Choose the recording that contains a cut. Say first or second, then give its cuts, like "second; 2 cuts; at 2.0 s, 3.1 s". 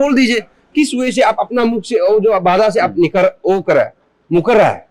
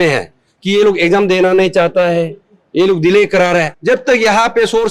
second; 1 cut; at 3.7 s